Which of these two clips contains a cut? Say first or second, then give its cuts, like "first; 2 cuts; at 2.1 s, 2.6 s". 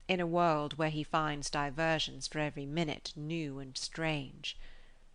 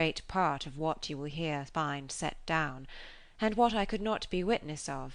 second; 1 cut; at 2.6 s